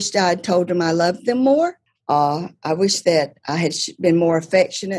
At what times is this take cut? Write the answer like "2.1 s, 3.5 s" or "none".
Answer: 1.9 s